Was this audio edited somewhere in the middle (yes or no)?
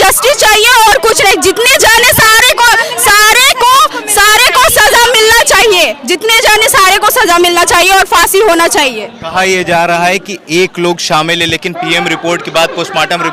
no